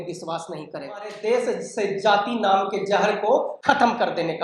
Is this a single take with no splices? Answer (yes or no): no